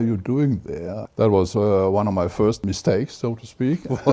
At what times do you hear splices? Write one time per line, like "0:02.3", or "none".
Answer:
0:01.0
0:02.6